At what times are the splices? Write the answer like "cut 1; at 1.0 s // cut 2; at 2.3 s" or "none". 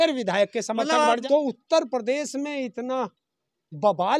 cut 1; at 1.2 s